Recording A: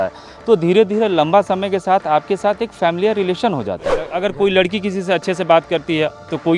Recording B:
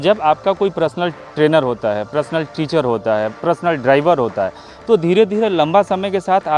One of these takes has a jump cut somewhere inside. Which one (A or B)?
A